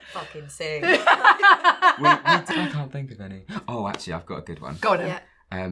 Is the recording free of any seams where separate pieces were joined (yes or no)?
no